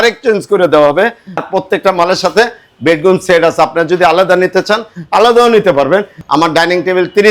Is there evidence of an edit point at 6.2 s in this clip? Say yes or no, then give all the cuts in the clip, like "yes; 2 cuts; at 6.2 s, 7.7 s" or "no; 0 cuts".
yes; 2 cuts; at 1.4 s, 6.2 s